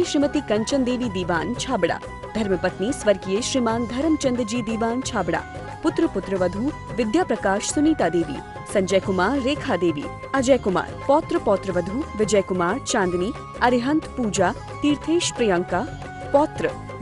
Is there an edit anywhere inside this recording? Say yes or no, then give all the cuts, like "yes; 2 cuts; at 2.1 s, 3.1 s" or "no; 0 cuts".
no; 0 cuts